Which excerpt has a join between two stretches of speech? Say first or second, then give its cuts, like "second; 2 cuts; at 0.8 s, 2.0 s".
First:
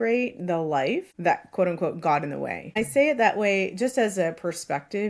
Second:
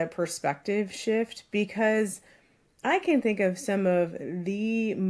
first; 2 cuts; at 1.1 s, 2.8 s